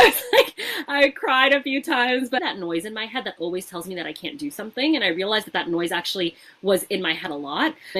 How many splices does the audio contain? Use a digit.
1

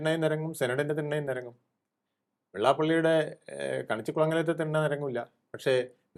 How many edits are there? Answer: 0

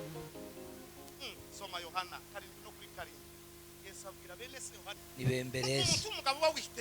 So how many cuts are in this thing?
1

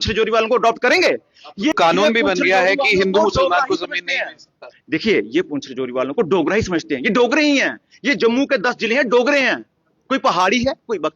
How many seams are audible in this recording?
1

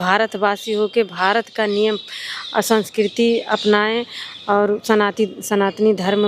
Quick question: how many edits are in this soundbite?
0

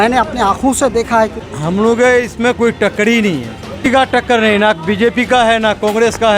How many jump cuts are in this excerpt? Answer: 2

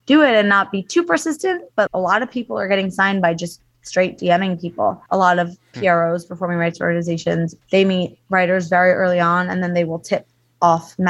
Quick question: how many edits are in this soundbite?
3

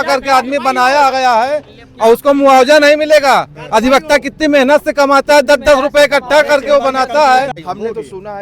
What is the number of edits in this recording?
1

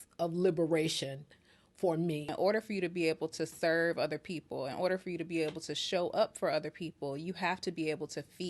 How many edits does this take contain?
1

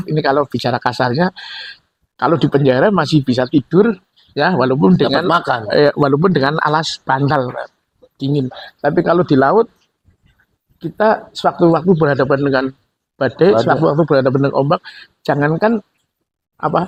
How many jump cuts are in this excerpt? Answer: 0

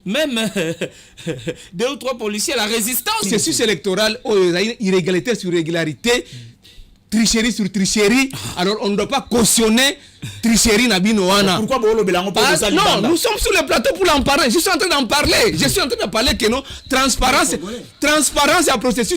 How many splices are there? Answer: 1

